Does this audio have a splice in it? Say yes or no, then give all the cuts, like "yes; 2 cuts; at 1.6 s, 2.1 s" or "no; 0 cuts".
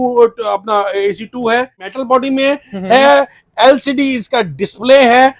yes; 1 cut; at 1.9 s